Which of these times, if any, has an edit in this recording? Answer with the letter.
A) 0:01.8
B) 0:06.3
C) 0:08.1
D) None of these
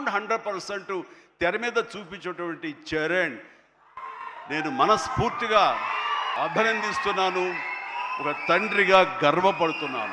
B